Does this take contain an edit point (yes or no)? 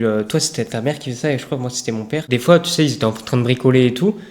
yes